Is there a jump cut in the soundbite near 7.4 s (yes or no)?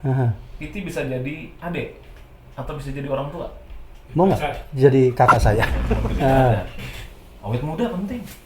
no